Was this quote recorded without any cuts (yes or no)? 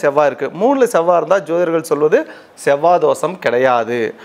yes